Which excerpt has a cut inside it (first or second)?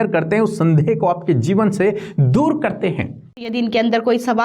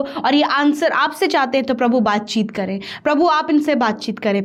first